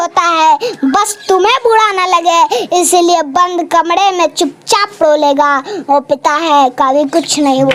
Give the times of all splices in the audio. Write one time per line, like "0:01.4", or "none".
none